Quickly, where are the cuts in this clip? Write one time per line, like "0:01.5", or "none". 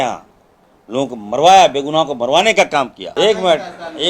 0:03.0